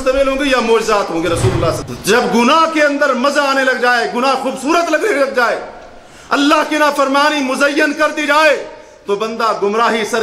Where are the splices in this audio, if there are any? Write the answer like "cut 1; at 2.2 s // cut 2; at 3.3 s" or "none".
cut 1; at 1.8 s